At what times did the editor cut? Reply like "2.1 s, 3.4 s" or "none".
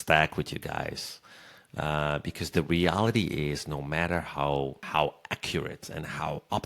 4.8 s